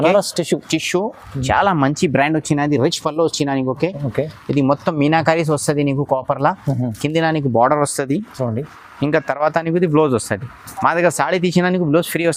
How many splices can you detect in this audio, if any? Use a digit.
0